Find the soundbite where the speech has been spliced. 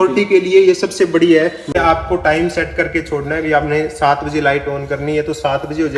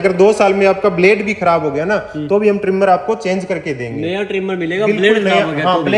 first; 1 cut; at 1.8 s

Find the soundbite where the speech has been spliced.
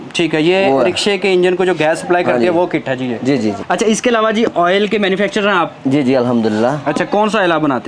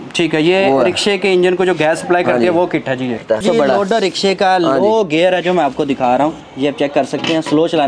second; 2 cuts; at 3.4 s, 6.5 s

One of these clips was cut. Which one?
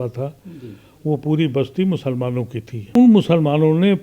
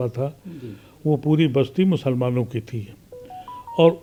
first; 1 cut; at 2.9 s

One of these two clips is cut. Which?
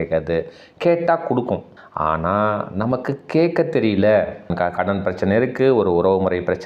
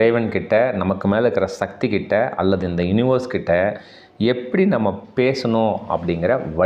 first; 2 cuts; at 1.8 s, 4.5 s

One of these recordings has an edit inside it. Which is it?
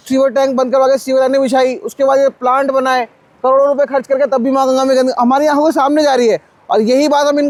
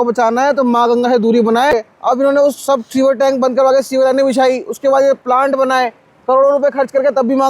second; 1 cut; at 1.7 s

